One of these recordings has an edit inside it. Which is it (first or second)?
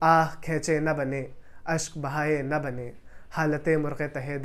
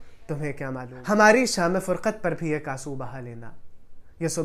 second